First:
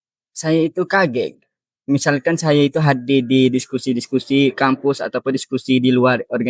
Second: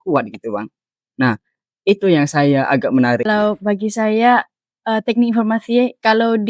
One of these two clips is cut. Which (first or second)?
second